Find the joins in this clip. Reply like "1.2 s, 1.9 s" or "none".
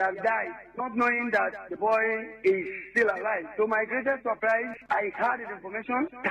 4.7 s